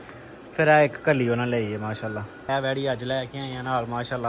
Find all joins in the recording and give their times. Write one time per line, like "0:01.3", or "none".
0:02.5